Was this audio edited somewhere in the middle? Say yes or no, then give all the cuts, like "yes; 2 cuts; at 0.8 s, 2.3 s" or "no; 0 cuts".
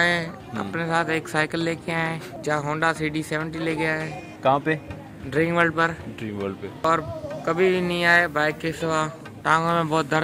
yes; 4 cuts; at 2.3 s, 4.3 s, 6.8 s, 9.3 s